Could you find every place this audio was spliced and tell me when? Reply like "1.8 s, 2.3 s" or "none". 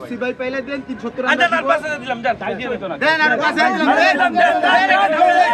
none